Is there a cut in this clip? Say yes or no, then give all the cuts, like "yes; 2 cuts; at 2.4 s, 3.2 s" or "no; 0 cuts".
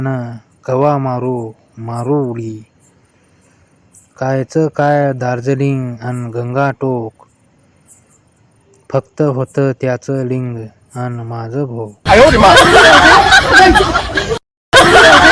yes; 1 cut; at 12.0 s